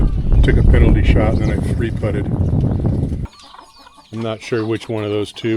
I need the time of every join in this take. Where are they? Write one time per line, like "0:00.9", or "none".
0:03.2